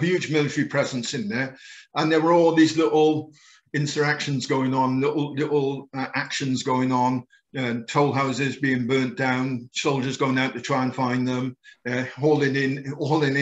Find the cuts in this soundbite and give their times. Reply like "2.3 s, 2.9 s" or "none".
none